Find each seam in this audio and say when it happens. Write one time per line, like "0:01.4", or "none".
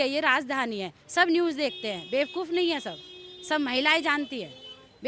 none

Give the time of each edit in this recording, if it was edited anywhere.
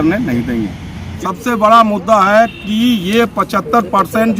0:01.1

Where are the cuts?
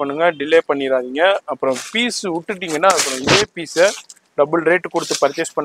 none

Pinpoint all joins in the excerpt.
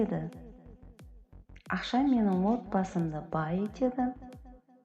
none

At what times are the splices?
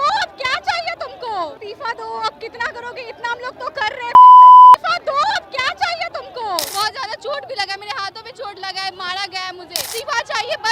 0:01.6
0:06.7
0:09.9

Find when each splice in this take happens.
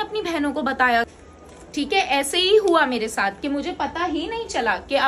0:01.1

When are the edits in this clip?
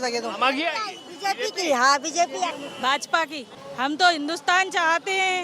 0:02.5
0:03.5

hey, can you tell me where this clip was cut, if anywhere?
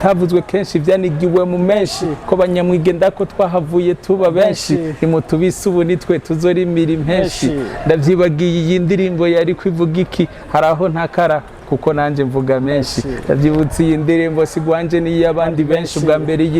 none

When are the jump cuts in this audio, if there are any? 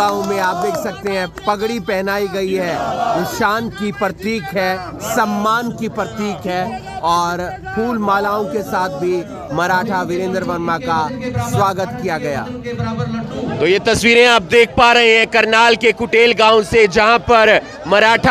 0:13.5

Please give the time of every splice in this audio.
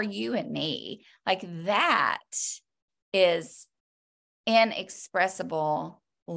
none

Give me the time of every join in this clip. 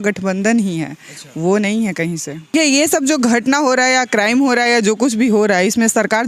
0:02.5

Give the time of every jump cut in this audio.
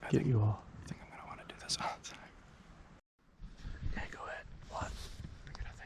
0:03.3

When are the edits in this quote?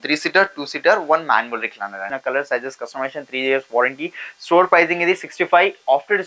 0:02.1

